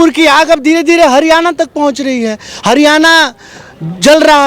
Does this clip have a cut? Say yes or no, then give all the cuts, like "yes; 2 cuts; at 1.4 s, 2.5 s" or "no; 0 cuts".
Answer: no; 0 cuts